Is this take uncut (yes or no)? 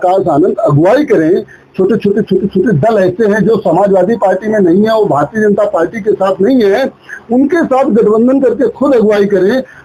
yes